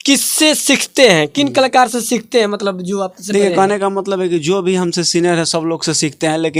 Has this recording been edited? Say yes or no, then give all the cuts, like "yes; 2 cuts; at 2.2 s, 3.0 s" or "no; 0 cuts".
no; 0 cuts